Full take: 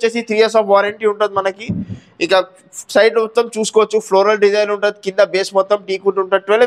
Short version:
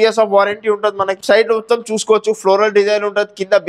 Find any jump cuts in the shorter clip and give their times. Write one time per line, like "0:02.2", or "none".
0:01.2